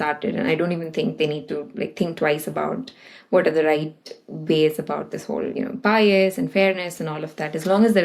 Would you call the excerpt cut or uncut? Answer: uncut